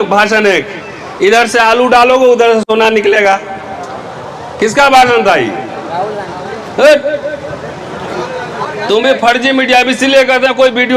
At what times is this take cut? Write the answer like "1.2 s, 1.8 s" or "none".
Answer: none